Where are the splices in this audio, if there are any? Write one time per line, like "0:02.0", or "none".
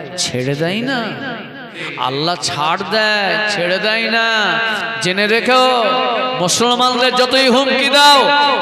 none